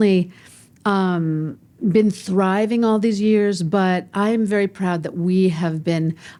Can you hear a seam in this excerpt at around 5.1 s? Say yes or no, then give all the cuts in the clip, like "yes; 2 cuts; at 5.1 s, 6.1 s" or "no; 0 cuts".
no; 0 cuts